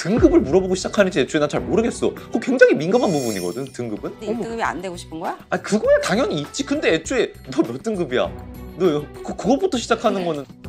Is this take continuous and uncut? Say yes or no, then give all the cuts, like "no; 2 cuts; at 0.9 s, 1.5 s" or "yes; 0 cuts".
no; 1 cut; at 4.2 s